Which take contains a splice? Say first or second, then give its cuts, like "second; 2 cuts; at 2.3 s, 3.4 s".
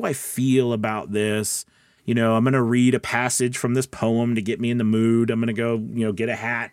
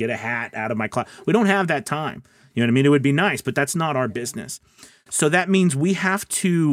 second; 1 cut; at 3.7 s